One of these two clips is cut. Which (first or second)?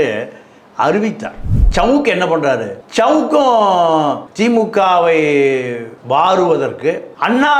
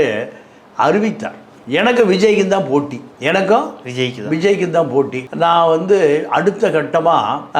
first